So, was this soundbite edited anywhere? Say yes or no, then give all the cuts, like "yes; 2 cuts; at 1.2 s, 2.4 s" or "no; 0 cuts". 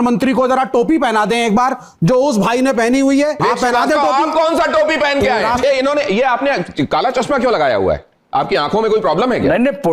yes; 2 cuts; at 3.4 s, 5.6 s